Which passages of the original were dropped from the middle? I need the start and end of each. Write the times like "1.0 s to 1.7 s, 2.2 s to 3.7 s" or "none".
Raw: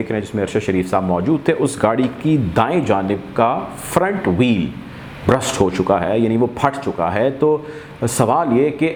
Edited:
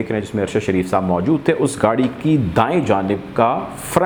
none